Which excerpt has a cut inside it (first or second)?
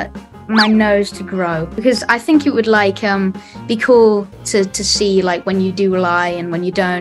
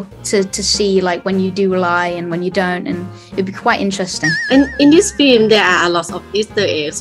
first